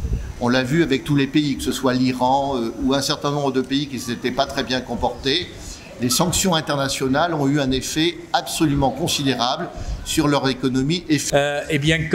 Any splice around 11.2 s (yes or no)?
yes